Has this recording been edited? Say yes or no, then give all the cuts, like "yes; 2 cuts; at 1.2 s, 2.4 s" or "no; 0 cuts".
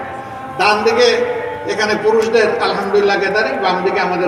no; 0 cuts